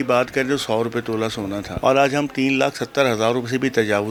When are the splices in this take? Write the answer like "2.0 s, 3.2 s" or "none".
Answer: none